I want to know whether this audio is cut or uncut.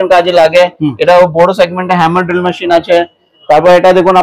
uncut